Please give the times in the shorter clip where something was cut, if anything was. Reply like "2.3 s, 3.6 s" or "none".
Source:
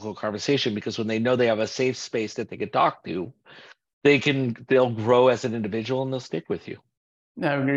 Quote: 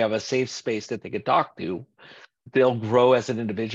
2.4 s